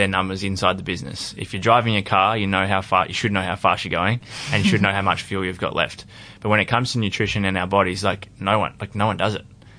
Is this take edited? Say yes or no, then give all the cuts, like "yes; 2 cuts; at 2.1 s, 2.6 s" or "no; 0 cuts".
no; 0 cuts